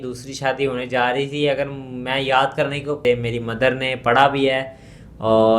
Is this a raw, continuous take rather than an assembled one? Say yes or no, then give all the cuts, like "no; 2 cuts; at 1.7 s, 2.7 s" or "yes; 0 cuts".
no; 1 cut; at 3.0 s